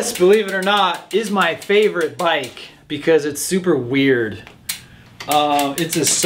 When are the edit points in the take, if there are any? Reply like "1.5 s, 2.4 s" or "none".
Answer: none